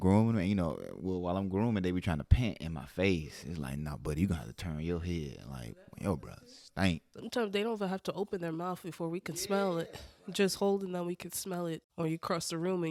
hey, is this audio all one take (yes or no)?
yes